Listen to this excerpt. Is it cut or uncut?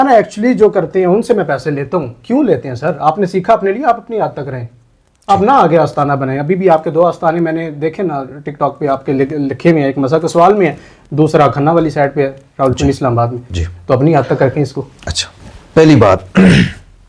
uncut